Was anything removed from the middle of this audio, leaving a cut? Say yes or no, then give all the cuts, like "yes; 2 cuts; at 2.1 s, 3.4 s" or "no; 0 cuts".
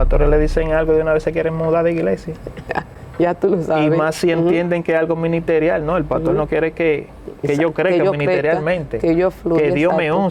no; 0 cuts